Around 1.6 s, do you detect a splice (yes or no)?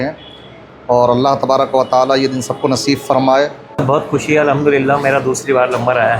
no